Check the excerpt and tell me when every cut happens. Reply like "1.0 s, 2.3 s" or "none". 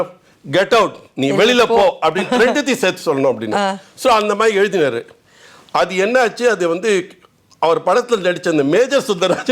none